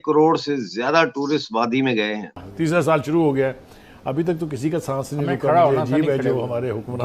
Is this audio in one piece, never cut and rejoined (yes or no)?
no